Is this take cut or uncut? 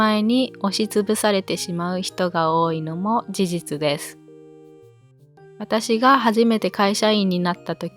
uncut